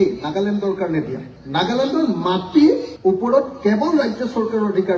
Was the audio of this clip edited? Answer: yes; 1 cut; at 1.3 s

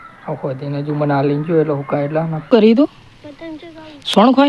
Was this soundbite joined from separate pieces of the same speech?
yes; 1 cut; at 2.5 s

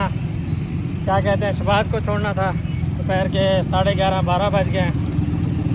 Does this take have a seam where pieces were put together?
no; 0 cuts

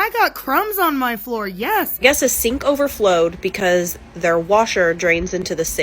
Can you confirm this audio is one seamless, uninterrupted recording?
no; 1 cut; at 2.0 s

